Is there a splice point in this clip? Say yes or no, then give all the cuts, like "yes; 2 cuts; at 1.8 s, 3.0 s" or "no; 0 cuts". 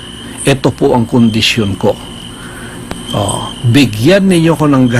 no; 0 cuts